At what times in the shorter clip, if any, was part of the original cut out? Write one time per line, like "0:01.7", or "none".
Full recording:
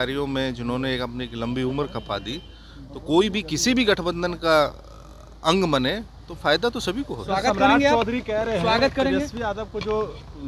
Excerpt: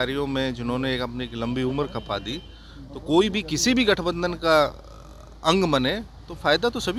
none

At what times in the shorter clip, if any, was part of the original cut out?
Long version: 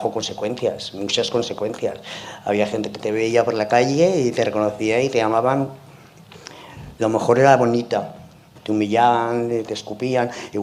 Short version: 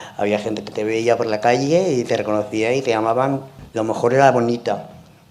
0:03.6

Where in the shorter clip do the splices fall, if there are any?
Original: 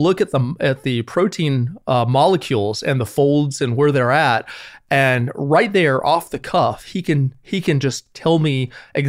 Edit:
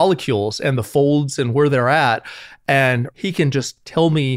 0:03.1

